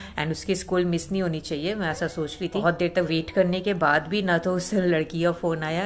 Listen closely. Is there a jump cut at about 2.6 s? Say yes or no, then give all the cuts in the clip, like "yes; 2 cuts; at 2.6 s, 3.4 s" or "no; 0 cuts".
yes; 1 cut; at 2.6 s